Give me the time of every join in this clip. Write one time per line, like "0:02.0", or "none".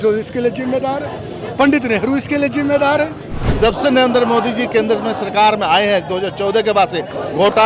0:03.4